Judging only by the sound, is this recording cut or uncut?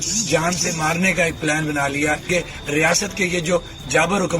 cut